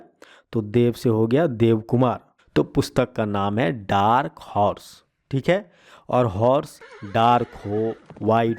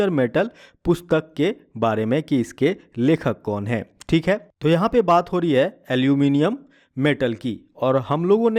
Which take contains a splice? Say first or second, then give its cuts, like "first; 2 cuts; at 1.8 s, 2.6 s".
first; 1 cut; at 2.3 s